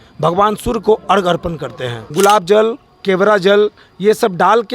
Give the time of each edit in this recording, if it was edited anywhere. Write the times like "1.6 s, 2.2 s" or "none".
2.0 s

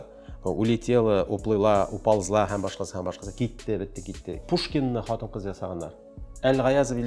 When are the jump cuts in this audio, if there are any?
4.4 s

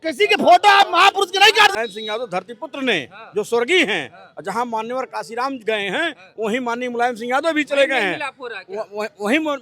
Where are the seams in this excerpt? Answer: 1.8 s

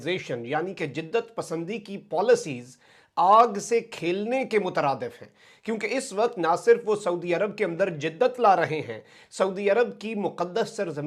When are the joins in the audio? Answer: none

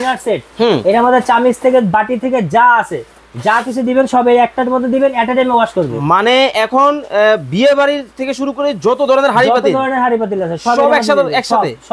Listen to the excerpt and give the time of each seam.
none

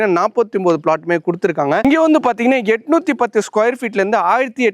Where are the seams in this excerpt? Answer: 1.8 s

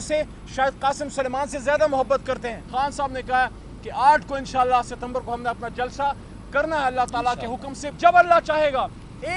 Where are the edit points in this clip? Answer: 2.6 s, 7.8 s

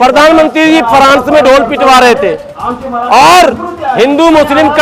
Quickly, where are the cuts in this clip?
none

